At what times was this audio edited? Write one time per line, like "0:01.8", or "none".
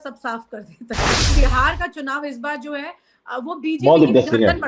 0:01.2